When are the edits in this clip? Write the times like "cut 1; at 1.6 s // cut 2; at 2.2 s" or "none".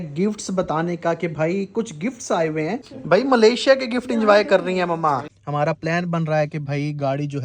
cut 1; at 2.9 s // cut 2; at 5.3 s